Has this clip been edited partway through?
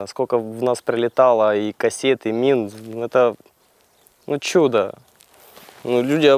no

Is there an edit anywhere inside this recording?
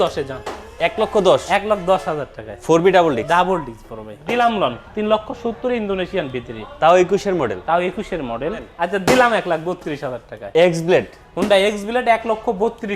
yes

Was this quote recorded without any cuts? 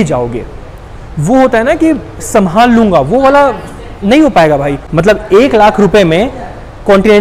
no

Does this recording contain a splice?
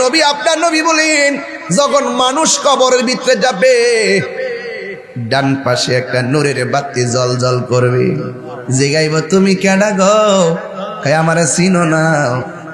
no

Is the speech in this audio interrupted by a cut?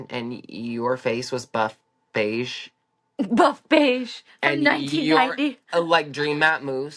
no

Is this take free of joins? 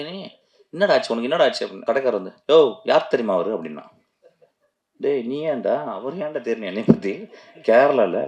no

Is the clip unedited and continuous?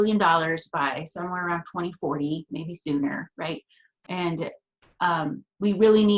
yes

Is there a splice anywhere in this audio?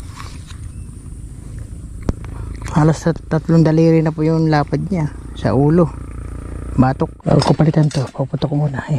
yes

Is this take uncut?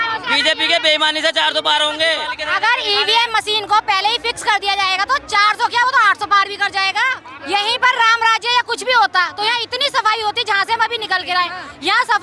no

